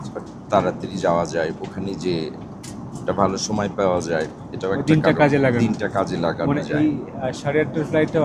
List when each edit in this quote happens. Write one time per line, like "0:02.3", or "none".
none